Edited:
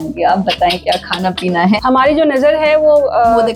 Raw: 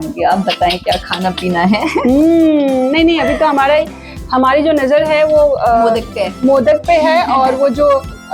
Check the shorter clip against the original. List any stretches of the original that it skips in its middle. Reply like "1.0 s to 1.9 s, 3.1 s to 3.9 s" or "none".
1.8 s to 4.3 s